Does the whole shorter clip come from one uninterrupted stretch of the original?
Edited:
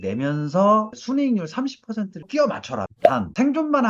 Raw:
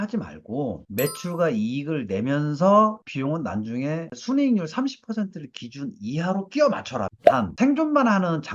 no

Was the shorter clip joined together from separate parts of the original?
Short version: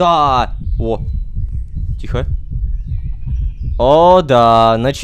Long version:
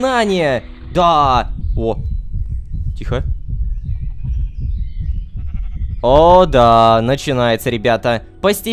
yes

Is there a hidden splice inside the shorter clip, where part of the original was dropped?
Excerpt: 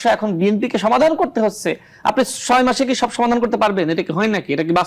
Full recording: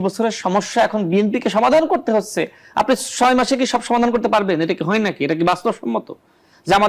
no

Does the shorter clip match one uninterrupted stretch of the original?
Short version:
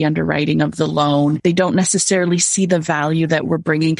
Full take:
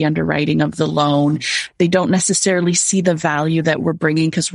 no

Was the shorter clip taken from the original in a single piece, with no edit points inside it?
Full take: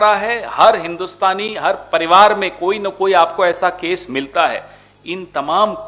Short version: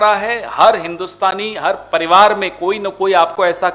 yes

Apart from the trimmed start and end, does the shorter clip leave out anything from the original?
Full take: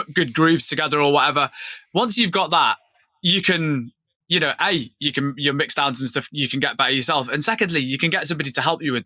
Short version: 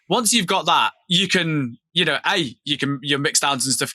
yes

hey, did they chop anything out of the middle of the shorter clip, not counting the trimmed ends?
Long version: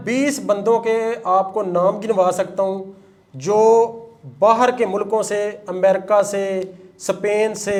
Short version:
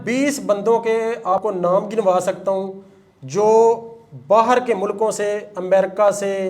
yes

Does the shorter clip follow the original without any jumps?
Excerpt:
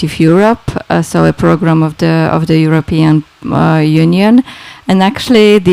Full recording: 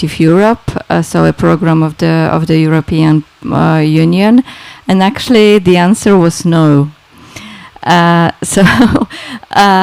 yes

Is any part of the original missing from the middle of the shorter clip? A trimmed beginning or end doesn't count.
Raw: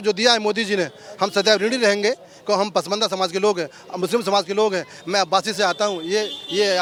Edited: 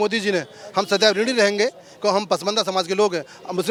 no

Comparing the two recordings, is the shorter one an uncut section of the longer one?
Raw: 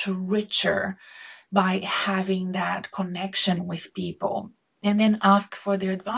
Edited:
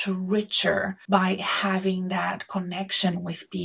no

